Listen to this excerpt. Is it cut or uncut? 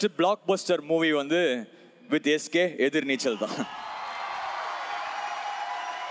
uncut